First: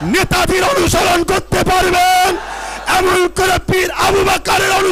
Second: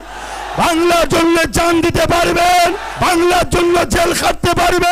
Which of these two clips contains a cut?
second; 1 cut; at 2.9 s

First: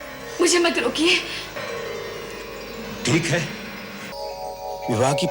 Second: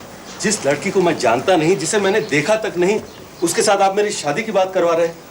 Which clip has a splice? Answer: first; 2 cuts; at 1.6 s, 4.1 s

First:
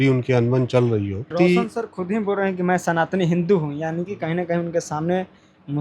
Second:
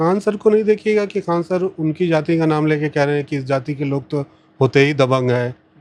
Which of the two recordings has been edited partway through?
first; 1 cut; at 1.3 s

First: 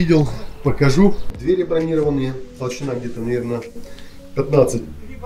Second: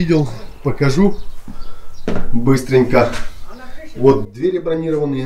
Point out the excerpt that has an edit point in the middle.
first; 1 cut; at 1.3 s

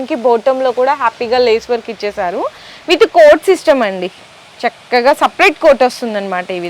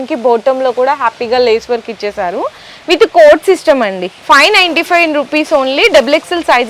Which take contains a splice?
second; 1 cut; at 4.1 s

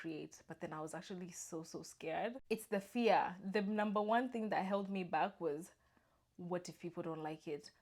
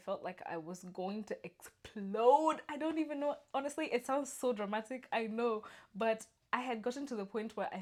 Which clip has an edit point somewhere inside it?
first; 1 cut; at 2.4 s

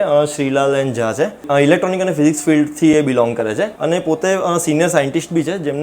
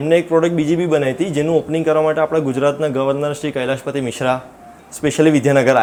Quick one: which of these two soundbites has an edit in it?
first; 2 cuts; at 1.4 s, 3.8 s

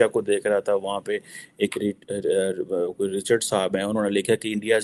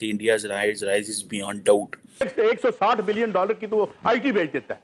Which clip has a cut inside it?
second; 1 cut; at 2.3 s

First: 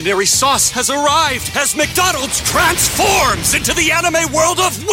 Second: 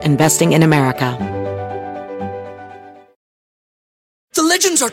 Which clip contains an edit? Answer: second; 1 cut; at 1.1 s

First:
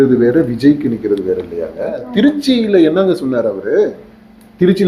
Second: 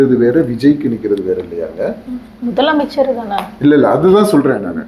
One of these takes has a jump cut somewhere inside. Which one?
first; 1 cut; at 2.0 s

